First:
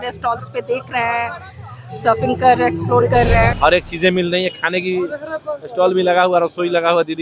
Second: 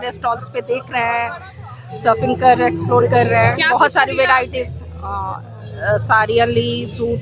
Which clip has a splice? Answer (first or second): first